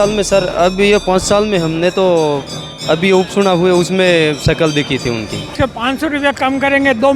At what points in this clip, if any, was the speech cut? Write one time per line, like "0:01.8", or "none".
0:05.6